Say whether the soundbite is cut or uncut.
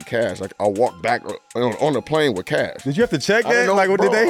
cut